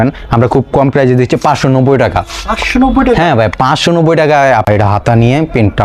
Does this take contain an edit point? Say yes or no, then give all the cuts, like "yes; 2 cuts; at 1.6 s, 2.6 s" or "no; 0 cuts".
yes; 1 cut; at 4.7 s